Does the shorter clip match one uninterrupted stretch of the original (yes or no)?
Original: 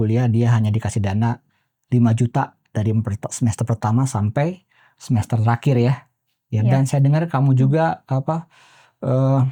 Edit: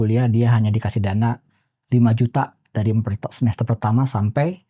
yes